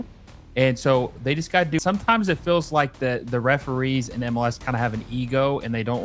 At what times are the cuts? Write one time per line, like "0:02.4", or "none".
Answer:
0:01.8